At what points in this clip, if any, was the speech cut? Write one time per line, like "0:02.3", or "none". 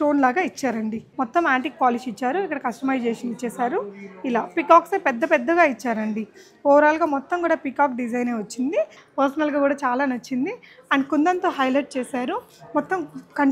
0:01.0
0:09.0